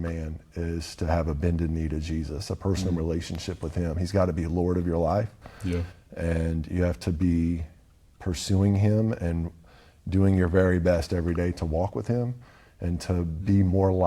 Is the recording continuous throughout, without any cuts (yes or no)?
yes